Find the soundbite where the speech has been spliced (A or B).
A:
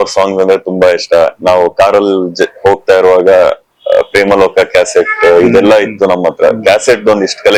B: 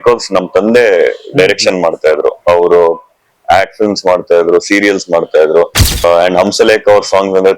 B